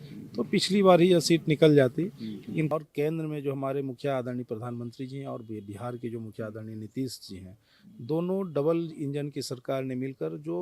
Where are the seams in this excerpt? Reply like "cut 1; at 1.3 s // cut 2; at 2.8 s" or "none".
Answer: cut 1; at 2.7 s

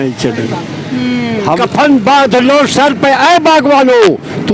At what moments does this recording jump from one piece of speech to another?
cut 1; at 1.6 s

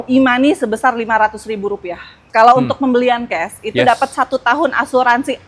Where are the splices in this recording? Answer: cut 1; at 2.2 s

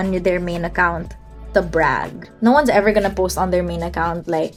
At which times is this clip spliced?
none

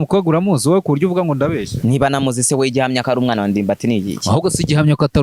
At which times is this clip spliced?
cut 1; at 1.7 s // cut 2; at 3.0 s

